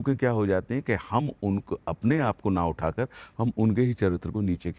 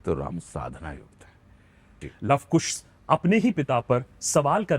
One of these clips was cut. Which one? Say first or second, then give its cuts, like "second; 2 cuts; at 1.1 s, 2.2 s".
second; 1 cut; at 2.1 s